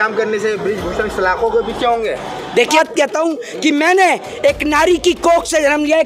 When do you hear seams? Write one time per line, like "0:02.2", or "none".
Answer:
0:02.7